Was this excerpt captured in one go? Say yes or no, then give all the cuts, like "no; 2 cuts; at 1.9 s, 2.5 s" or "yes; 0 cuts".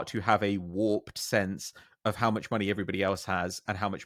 yes; 0 cuts